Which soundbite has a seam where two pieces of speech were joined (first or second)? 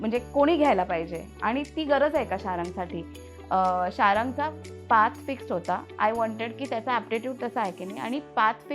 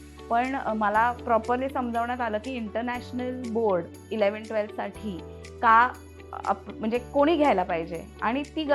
first